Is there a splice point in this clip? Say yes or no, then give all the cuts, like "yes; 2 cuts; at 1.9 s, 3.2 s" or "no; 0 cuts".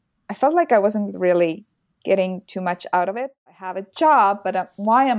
yes; 1 cut; at 3.1 s